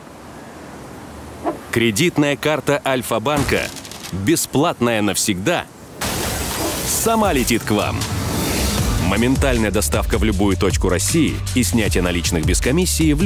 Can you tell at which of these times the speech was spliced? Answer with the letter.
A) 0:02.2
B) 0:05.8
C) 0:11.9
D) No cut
D